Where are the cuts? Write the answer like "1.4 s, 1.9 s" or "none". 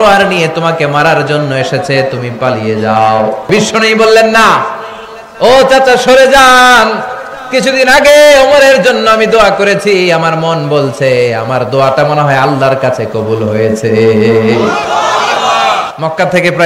3.5 s, 15.9 s